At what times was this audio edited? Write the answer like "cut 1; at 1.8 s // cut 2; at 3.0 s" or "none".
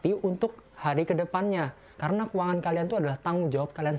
cut 1; at 1.9 s